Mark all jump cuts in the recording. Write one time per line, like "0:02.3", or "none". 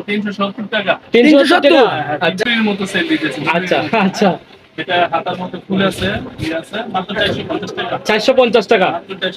0:02.4